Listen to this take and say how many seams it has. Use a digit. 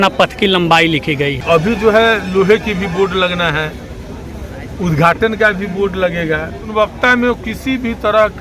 2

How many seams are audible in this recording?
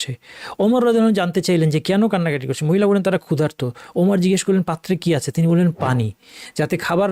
0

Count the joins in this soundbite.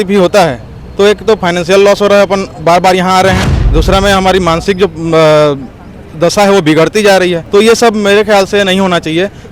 2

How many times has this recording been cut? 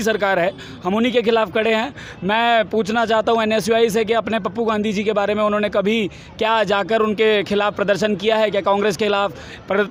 0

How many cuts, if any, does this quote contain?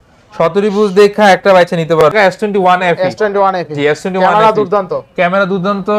1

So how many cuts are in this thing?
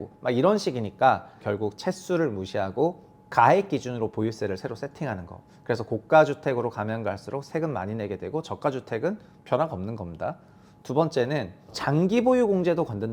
1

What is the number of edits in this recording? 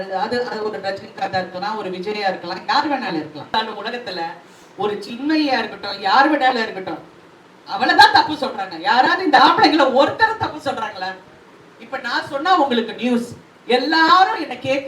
1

